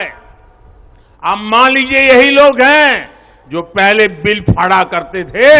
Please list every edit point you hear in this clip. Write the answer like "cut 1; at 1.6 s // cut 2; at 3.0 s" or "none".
none